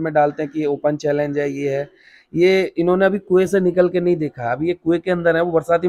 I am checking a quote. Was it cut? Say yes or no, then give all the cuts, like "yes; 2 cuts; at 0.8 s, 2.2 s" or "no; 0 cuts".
no; 0 cuts